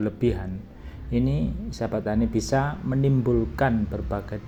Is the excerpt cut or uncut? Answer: uncut